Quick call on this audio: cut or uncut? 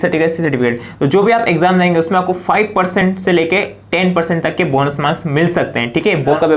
uncut